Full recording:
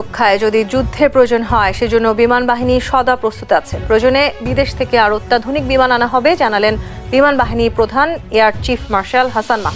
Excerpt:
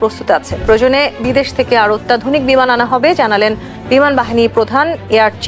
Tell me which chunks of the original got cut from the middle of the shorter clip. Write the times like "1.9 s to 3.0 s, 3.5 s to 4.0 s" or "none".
none